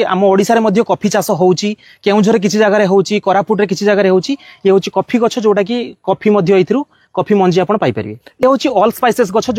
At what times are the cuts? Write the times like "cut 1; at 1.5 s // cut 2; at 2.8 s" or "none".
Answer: none